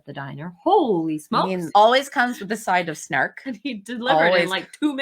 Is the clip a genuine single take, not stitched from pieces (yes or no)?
no